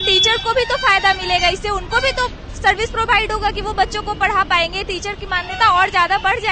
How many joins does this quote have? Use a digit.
0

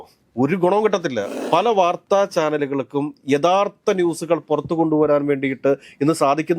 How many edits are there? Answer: 1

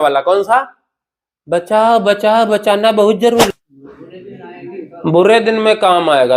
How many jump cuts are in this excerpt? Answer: 1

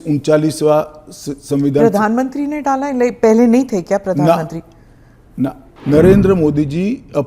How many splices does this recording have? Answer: 1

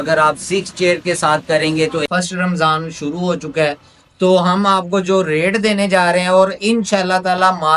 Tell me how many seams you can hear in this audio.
1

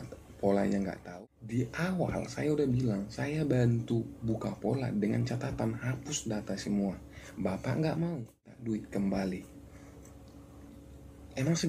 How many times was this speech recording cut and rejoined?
2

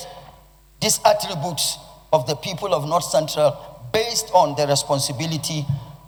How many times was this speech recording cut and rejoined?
0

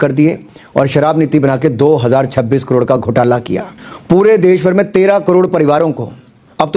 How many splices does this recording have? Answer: 1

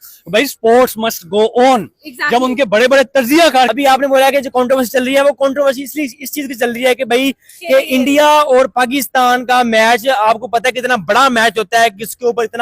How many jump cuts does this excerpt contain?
1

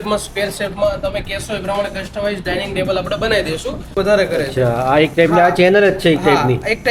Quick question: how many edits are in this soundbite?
1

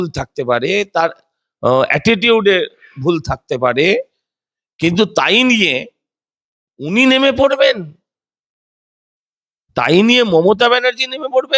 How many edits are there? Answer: 0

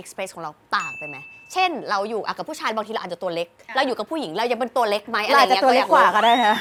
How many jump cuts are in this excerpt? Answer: 0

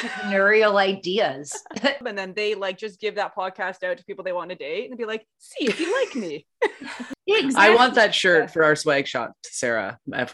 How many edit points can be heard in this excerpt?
2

